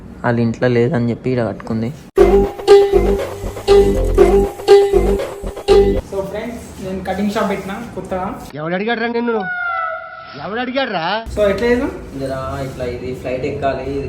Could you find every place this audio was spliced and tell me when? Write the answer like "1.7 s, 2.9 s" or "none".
6.1 s, 11.3 s